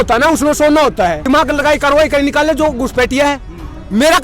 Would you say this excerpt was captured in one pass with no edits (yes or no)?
no